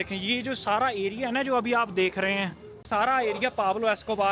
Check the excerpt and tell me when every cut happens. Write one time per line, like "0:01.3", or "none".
0:02.9